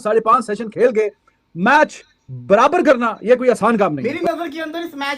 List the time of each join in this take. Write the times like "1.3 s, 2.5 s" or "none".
4.0 s